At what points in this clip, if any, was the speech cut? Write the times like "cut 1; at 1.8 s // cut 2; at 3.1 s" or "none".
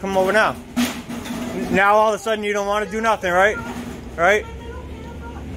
none